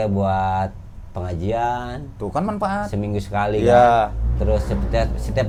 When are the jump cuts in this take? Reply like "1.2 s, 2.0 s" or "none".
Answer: none